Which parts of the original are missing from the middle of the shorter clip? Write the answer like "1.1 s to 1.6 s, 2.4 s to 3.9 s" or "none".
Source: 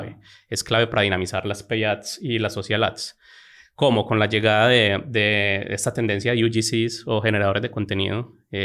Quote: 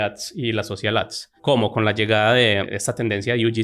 3.1 s to 3.6 s, 5.0 s to 5.7 s

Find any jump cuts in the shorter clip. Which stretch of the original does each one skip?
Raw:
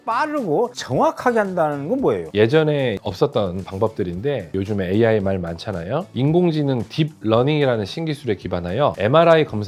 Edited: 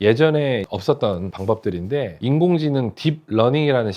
4.5 s to 6.1 s

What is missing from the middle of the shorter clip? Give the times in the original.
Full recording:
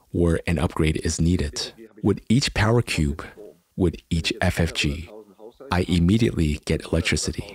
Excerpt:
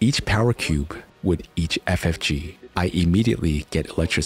3.3 s to 3.6 s, 5.1 s to 5.5 s

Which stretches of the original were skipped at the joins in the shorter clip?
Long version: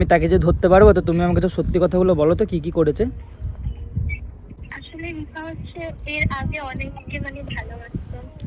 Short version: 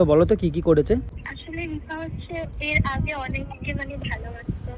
3.3 s to 4.7 s

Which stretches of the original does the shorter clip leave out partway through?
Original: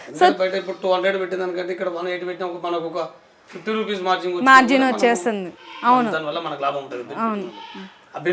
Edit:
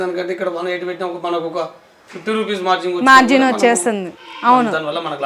none

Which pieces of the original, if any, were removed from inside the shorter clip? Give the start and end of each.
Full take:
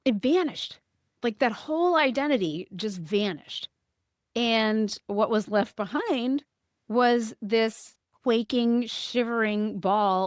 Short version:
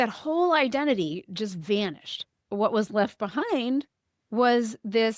3.9 s to 5.0 s

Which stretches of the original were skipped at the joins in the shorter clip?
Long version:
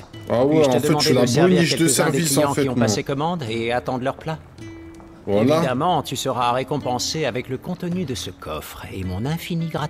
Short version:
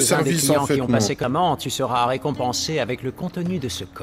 3.1 s to 5.7 s

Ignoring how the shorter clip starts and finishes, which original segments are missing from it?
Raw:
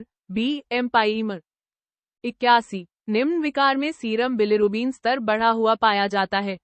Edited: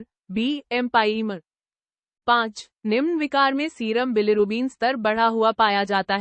2.4 s to 2.6 s

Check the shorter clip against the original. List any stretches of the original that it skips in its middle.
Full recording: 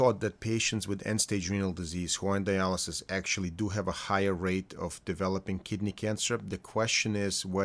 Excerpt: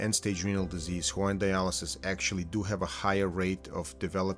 none

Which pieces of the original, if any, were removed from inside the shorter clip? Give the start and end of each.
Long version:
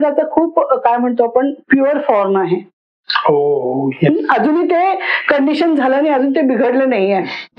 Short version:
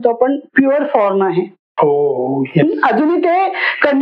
2.7 s to 3.1 s

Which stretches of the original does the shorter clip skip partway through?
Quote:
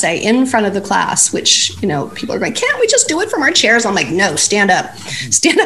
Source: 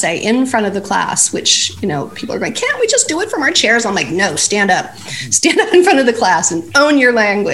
none

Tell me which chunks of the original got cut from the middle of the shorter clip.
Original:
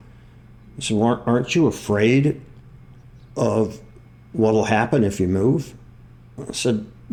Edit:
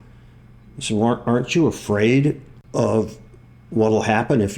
2.5 s to 3.2 s

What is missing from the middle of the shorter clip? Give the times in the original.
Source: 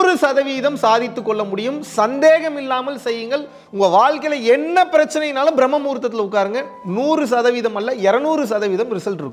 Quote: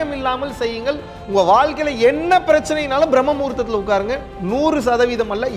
none

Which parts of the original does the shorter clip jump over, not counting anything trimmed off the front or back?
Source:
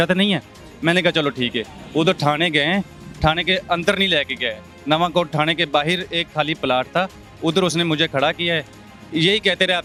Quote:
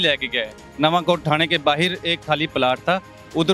none

